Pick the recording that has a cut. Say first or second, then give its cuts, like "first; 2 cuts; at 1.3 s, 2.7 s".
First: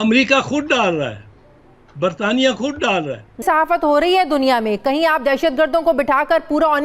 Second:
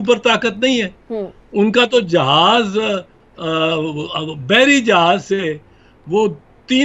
first; 1 cut; at 3.4 s